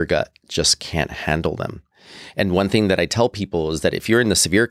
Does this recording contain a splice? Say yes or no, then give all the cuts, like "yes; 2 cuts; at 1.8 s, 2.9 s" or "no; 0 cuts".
no; 0 cuts